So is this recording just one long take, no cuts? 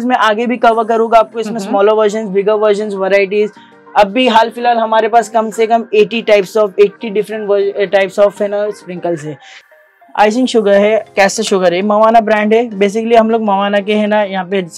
no; 1 cut; at 9.6 s

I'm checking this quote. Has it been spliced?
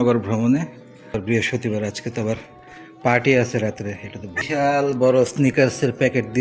yes; 2 cuts; at 1.1 s, 4.4 s

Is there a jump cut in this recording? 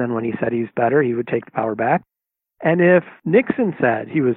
yes; 1 cut; at 3.2 s

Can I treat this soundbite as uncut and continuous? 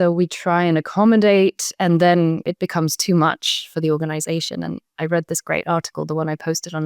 yes; 0 cuts

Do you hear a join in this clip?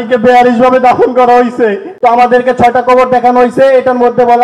yes; 1 cut; at 1.9 s

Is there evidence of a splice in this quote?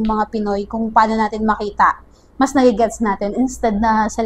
no; 0 cuts

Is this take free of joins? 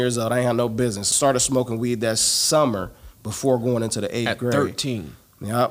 no; 1 cut; at 1.1 s

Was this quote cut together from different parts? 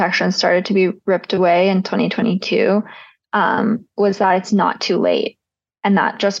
no; 0 cuts

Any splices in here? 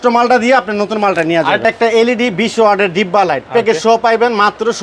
yes; 1 cut; at 1.6 s

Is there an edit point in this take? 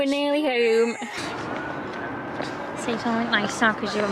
yes; 1 cut; at 1.2 s

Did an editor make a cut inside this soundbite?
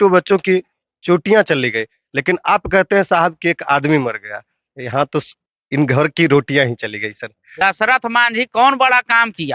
yes; 1 cut; at 7.4 s

